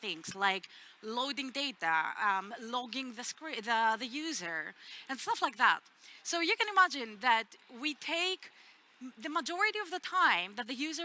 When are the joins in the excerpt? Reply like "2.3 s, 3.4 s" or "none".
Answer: none